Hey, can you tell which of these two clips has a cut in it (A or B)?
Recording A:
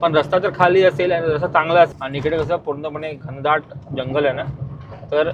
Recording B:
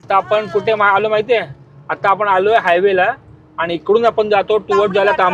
A